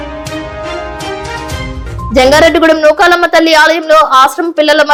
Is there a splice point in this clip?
no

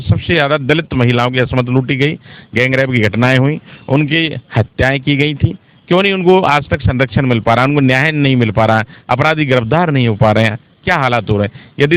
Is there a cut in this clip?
no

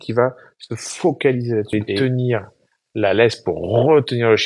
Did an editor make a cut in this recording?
yes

